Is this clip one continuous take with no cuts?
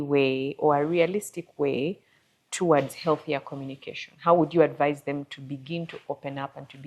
yes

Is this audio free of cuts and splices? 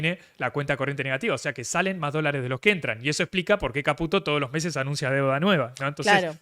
yes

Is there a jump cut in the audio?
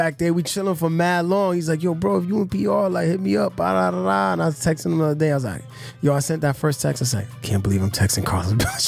no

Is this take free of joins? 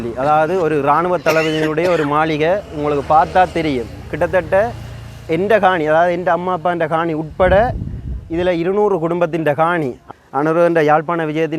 no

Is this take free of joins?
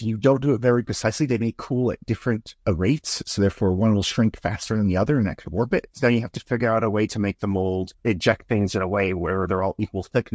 no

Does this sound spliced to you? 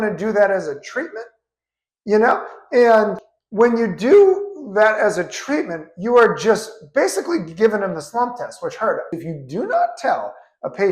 yes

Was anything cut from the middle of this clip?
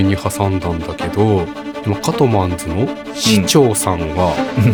no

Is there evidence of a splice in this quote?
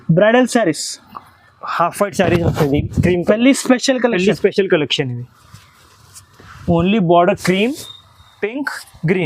no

